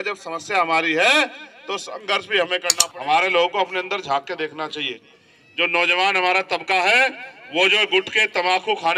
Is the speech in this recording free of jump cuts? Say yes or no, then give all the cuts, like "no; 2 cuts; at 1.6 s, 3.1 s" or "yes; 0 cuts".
no; 1 cut; at 2.7 s